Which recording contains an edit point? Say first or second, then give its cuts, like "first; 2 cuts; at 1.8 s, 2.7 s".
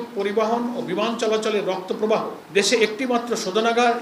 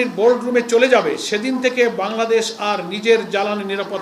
first; 1 cut; at 2.4 s